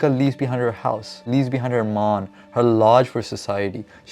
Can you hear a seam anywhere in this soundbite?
yes; 1 cut; at 1.2 s

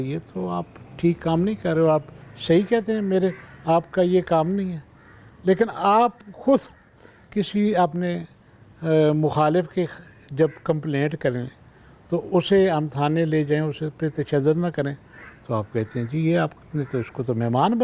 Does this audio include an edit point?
no; 0 cuts

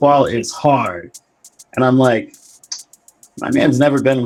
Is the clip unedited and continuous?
yes; 0 cuts

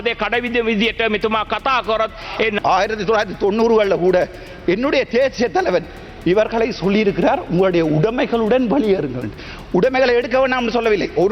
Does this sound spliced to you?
yes; 1 cut; at 2.6 s

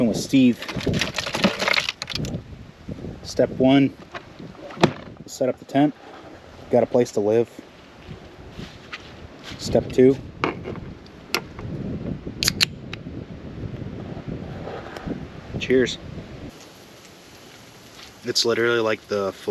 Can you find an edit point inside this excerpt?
yes; 1 cut; at 16.5 s

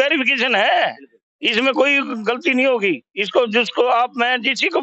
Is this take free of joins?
yes; 0 cuts

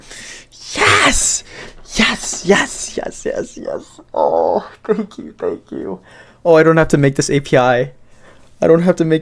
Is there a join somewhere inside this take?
no; 0 cuts

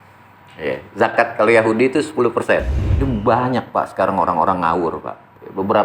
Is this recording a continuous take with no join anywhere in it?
no; 1 cut; at 2.8 s

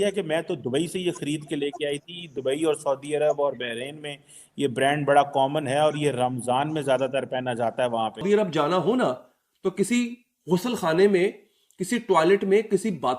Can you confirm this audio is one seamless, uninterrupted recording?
no; 1 cut; at 8.2 s

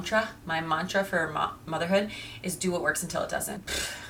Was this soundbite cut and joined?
no; 0 cuts

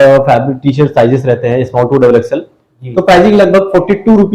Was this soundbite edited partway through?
no; 0 cuts

